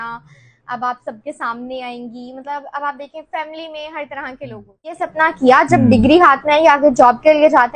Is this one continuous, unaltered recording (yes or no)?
no